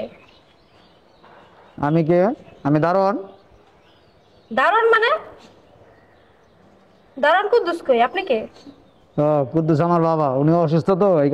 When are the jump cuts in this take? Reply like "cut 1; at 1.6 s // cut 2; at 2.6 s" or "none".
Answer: none